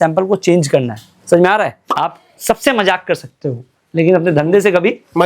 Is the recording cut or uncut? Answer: cut